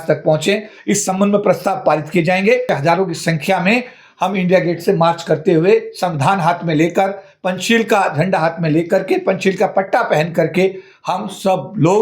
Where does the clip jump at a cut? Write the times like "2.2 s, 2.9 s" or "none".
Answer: 2.7 s